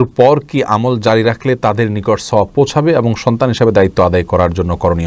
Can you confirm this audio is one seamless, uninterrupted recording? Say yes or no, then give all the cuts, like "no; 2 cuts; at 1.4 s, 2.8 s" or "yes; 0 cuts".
yes; 0 cuts